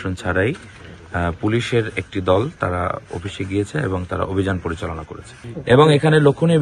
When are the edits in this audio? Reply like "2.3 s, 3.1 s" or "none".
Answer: 5.5 s

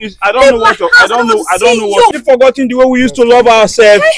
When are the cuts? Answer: 2.2 s

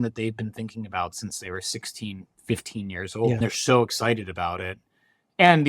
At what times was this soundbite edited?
3.4 s

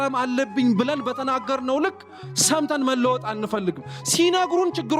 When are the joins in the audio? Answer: none

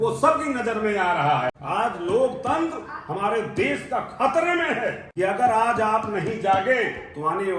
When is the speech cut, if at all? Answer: 1.6 s, 5.0 s

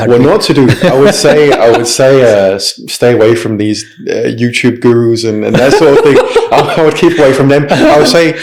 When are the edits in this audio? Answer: none

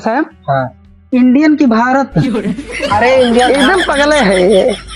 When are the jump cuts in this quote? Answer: none

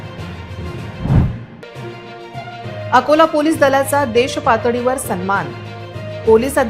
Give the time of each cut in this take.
0.9 s

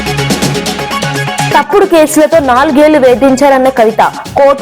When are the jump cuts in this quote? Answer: 1.5 s

